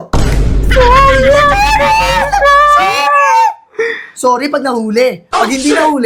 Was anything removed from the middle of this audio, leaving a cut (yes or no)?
no